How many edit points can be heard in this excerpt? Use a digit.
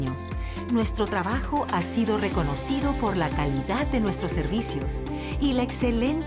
0